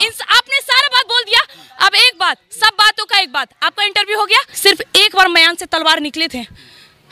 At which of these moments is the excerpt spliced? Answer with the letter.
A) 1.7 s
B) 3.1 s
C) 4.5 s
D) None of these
C